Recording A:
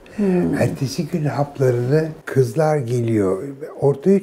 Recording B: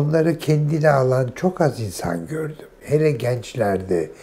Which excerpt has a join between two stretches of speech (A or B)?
A